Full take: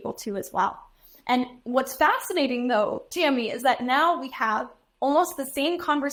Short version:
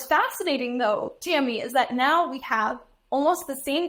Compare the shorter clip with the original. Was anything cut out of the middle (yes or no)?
no